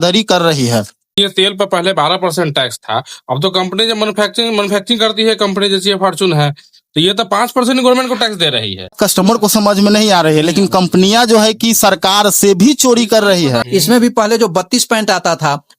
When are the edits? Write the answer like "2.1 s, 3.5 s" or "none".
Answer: 1.1 s, 8.9 s, 13.6 s